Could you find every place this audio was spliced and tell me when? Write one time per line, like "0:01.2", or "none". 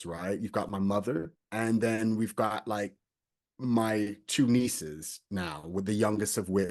0:01.4